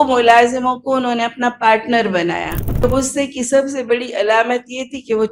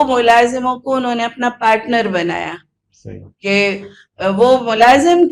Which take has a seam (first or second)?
first